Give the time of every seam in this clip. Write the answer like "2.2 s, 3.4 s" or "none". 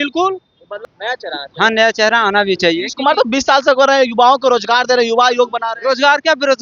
0.9 s